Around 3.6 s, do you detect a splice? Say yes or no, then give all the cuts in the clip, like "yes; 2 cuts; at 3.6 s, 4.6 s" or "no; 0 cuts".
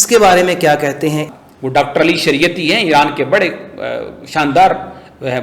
no; 1 cut; at 1.3 s